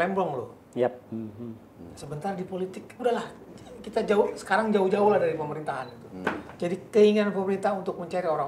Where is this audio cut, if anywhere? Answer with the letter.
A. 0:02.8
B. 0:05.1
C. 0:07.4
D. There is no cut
D